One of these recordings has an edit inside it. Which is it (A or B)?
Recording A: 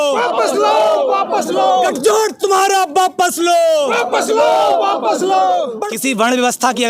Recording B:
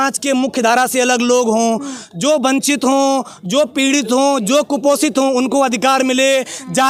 A